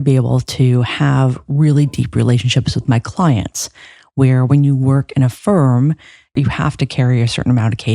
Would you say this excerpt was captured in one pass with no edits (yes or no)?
no